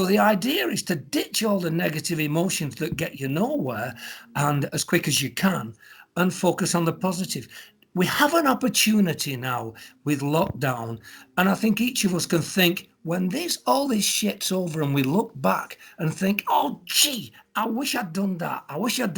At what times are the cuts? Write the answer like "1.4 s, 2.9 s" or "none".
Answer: none